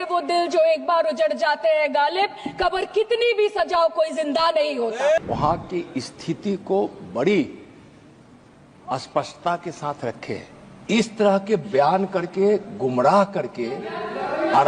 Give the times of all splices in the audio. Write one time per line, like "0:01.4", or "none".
0:05.2